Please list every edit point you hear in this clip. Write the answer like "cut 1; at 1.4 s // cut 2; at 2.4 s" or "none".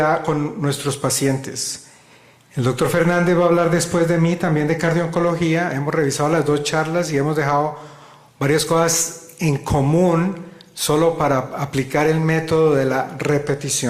cut 1; at 5.6 s